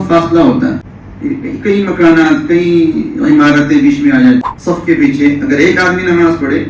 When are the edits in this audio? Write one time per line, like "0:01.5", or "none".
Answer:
0:01.3
0:04.5